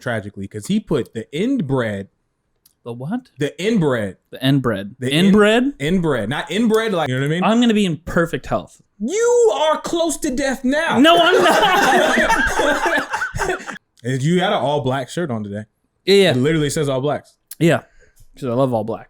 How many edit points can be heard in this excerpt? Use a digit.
2